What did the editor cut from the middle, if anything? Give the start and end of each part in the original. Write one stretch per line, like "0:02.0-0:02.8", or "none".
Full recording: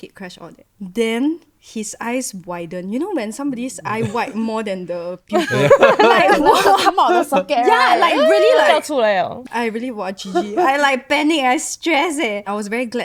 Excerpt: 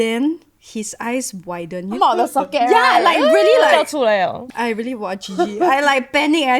0:03.0-0:06.9